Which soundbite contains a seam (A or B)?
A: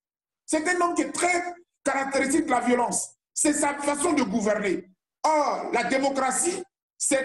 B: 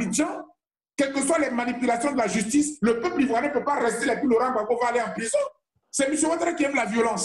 B